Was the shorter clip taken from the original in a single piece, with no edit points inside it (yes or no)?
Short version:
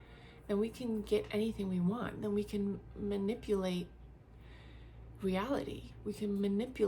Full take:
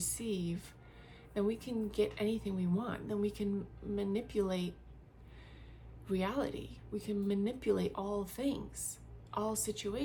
yes